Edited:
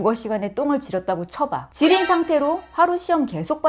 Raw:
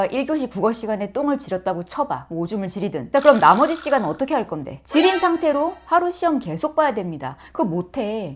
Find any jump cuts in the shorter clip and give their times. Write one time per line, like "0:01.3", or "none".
0:01.6